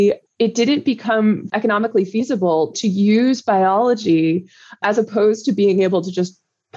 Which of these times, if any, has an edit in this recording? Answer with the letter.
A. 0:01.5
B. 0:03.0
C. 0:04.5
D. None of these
A